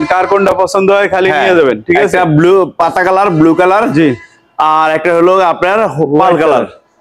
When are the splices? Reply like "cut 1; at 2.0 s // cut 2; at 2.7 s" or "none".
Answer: none